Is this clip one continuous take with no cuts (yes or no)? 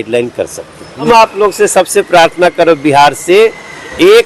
no